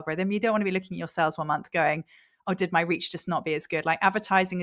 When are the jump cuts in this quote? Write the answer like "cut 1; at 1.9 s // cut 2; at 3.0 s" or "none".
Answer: none